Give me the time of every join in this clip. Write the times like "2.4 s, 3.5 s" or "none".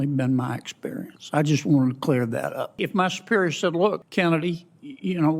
2.8 s, 4.0 s